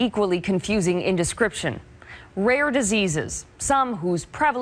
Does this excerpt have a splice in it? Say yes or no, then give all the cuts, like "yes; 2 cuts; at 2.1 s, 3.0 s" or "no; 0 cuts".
no; 0 cuts